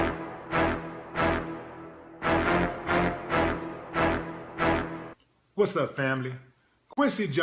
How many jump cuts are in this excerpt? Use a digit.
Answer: 1